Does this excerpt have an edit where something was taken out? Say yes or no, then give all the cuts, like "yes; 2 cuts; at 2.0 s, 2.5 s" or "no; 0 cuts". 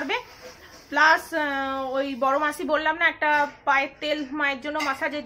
no; 0 cuts